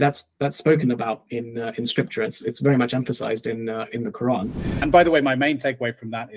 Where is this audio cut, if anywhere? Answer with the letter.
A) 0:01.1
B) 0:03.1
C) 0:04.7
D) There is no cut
C